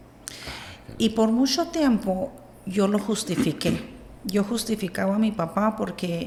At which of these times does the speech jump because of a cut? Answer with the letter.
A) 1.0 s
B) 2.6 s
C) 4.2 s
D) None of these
D